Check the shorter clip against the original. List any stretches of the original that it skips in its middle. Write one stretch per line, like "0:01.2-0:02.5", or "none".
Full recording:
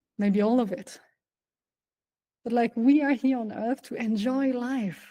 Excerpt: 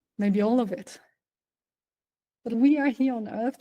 0:02.5-0:02.8